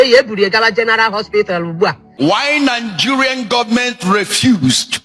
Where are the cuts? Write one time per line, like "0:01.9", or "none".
0:02.0